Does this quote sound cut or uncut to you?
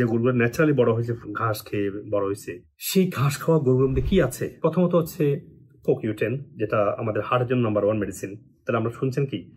uncut